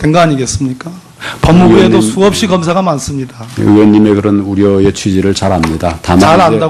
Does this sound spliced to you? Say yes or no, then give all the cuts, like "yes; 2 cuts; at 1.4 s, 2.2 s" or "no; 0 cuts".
no; 0 cuts